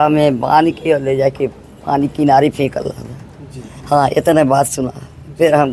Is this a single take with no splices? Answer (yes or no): yes